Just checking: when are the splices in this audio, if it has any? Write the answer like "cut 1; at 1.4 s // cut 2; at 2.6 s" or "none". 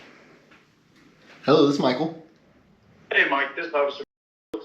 none